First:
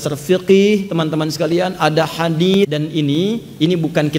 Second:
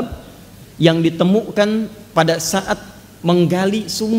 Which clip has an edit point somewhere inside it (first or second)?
first